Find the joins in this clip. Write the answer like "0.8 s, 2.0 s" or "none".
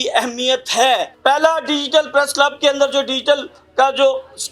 1.1 s